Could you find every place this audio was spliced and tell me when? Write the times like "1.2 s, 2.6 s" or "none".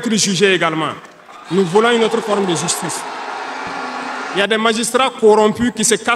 4.2 s